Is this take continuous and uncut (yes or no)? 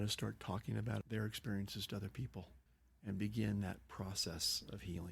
yes